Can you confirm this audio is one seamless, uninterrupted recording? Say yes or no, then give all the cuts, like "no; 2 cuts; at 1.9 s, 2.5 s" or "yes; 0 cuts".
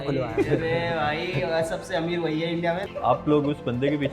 no; 1 cut; at 2.9 s